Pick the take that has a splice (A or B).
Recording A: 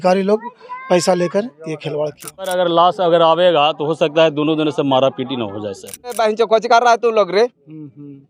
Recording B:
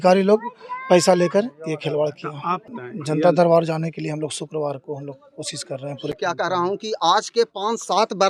A